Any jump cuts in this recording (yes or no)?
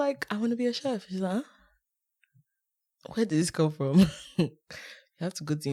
no